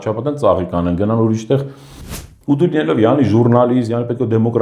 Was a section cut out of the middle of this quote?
yes; 1 cut; at 2.2 s

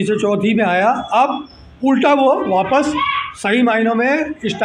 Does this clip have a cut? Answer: no; 0 cuts

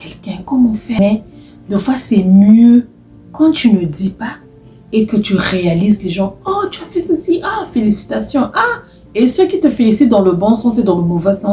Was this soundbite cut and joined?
yes; 1 cut; at 1.0 s

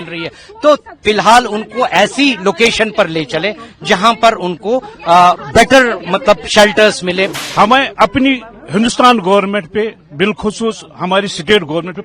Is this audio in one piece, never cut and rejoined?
no; 1 cut; at 7.3 s

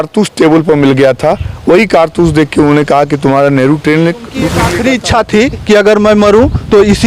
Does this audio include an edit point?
yes; 1 cut; at 4.6 s

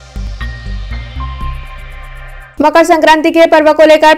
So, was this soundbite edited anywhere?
no; 0 cuts

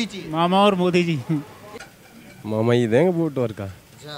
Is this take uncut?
no; 1 cut; at 1.7 s

